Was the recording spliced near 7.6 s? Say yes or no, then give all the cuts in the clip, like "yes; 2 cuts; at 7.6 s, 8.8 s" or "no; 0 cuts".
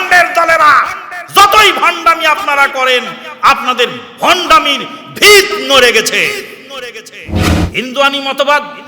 yes; 1 cut; at 7.6 s